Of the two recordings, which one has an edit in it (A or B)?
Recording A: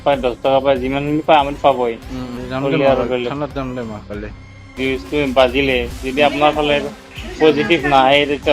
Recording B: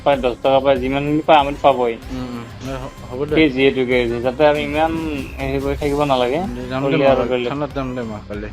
A